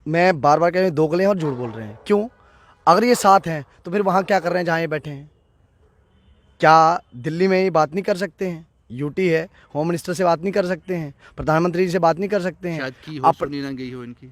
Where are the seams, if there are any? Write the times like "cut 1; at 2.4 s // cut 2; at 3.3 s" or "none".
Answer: none